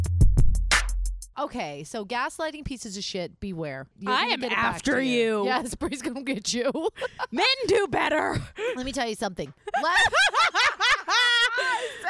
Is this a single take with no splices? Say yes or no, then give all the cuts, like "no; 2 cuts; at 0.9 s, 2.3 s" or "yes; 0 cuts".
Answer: no; 2 cuts; at 1.3 s, 4.0 s